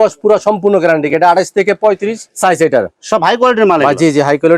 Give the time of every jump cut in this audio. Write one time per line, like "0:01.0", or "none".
0:02.9